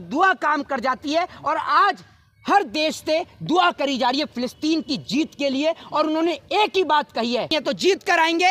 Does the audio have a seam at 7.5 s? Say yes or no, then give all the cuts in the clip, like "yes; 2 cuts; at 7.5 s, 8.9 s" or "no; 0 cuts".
yes; 1 cut; at 7.5 s